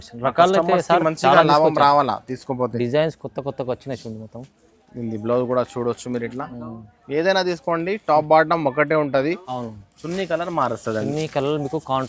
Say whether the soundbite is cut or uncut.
uncut